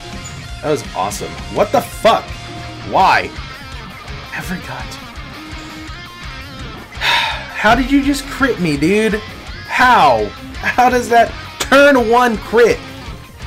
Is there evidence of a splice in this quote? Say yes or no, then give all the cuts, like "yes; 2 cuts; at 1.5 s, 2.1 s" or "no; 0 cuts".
no; 0 cuts